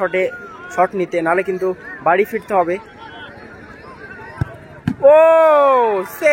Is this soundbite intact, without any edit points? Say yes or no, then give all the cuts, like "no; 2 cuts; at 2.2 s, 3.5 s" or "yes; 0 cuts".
yes; 0 cuts